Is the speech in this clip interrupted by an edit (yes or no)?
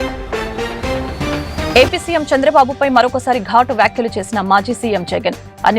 yes